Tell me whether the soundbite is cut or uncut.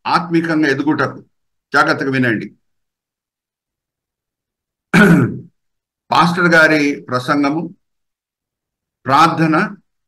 uncut